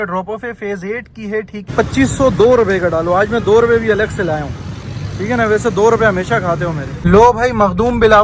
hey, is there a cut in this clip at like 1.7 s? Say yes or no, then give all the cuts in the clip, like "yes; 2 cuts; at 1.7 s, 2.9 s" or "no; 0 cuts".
yes; 2 cuts; at 1.7 s, 6.9 s